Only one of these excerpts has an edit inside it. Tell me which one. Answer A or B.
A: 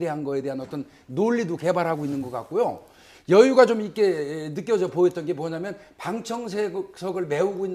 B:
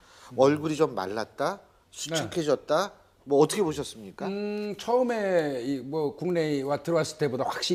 A